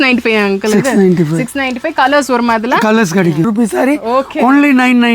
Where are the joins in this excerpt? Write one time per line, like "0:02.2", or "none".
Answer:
0:03.5